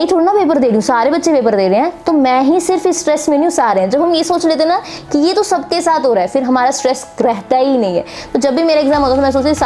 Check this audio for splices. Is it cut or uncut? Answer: uncut